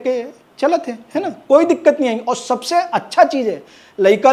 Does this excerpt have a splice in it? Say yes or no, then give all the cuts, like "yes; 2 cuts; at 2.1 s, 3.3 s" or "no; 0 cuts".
no; 0 cuts